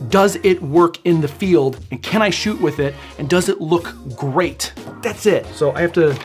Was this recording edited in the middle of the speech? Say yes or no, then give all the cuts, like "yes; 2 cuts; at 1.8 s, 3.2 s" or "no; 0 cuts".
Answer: no; 0 cuts